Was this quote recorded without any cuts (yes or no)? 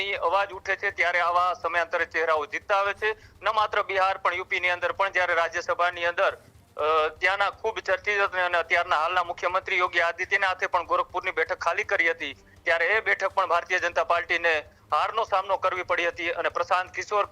yes